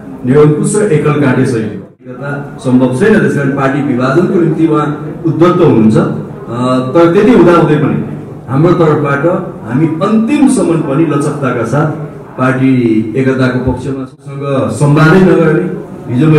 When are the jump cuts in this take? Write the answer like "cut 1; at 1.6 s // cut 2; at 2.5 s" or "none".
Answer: cut 1; at 2.1 s // cut 2; at 14.3 s